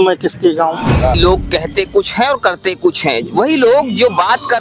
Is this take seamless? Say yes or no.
no